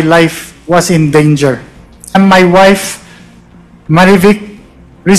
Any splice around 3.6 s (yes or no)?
no